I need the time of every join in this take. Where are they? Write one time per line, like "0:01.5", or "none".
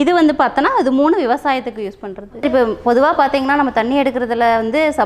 0:02.4